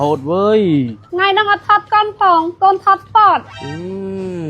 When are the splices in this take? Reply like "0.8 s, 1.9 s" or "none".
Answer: 1.0 s